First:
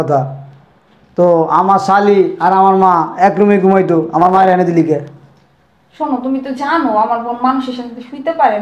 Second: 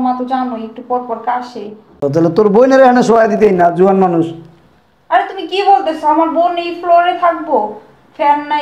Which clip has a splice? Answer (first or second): second